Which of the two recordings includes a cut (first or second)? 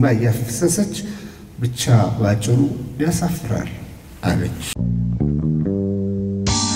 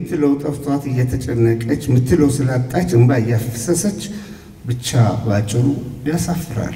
first